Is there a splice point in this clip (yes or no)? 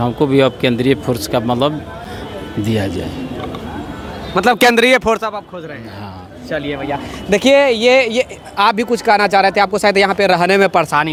no